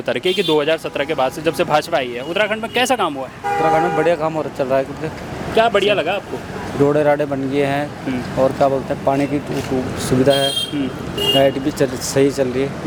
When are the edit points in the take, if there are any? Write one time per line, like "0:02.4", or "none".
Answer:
none